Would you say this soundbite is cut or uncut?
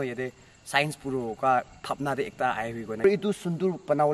cut